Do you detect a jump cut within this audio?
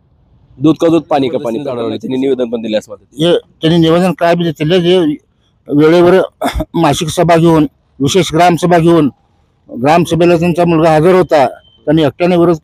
yes; 1 cut; at 1.7 s

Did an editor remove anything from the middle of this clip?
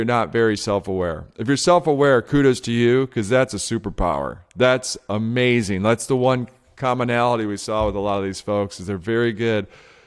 no; 0 cuts

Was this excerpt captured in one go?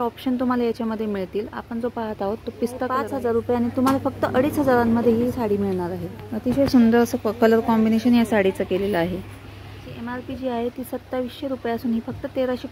no; 2 cuts; at 3.1 s, 9.9 s

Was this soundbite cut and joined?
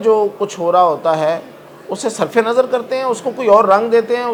no; 0 cuts

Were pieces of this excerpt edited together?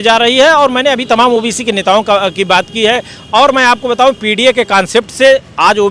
no; 0 cuts

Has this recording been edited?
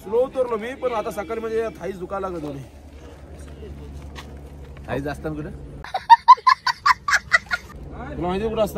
no; 0 cuts

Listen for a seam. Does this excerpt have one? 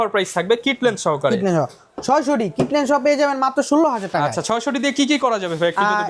no; 0 cuts

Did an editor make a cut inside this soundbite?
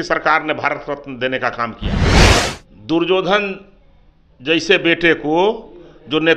yes; 1 cut; at 2.2 s

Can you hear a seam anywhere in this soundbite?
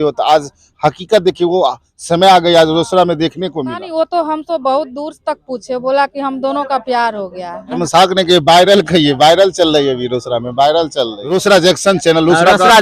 yes; 3 cuts; at 3.8 s, 7.8 s, 11.2 s

